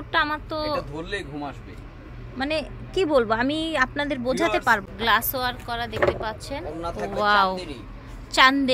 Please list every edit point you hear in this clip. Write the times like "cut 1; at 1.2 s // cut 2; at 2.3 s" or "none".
cut 1; at 4.8 s